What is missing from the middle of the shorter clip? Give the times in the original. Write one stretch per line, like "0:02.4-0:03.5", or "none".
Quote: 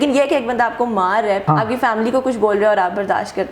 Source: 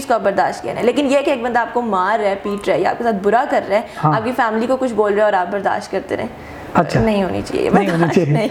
0:02.4-0:04.0